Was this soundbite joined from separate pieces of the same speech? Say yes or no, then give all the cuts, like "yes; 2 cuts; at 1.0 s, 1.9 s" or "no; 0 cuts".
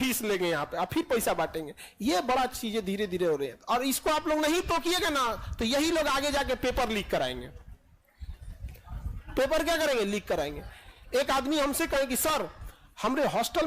no; 0 cuts